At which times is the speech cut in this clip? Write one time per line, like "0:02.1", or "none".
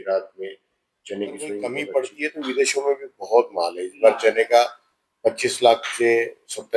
0:01.7